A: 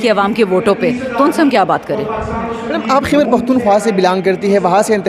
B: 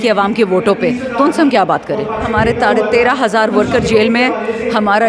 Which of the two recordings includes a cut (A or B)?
B